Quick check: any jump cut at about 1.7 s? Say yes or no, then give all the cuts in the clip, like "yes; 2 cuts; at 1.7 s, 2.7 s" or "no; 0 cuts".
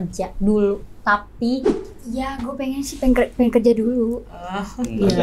yes; 1 cut; at 1.7 s